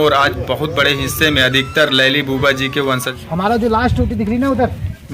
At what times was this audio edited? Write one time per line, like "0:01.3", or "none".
0:03.1

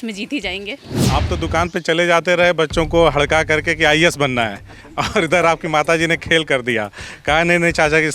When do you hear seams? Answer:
0:01.0

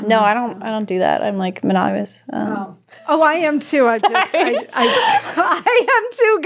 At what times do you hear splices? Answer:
none

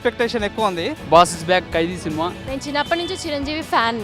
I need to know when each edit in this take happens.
0:00.9
0:02.5

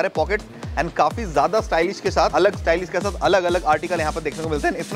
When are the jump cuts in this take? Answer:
0:02.3

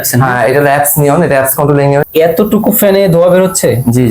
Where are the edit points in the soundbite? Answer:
0:02.0

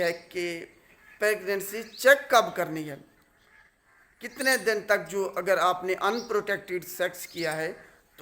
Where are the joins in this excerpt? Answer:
none

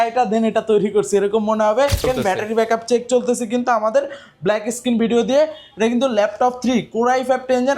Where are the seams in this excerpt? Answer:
0:02.0

